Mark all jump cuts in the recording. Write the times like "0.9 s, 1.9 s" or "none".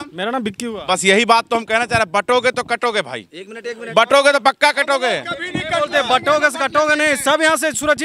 none